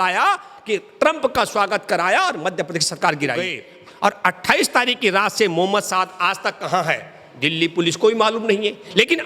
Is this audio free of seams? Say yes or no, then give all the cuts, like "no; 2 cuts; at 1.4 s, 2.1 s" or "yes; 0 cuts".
no; 1 cut; at 3.6 s